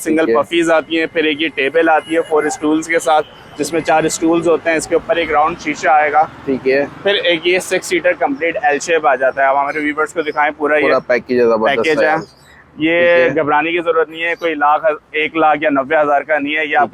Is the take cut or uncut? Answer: uncut